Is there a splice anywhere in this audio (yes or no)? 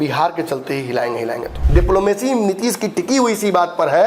yes